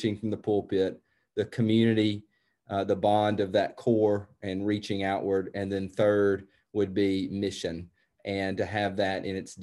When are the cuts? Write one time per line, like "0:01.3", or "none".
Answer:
none